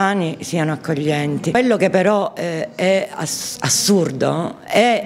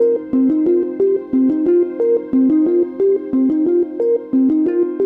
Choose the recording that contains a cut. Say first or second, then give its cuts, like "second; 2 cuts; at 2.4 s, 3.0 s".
first; 1 cut; at 1.6 s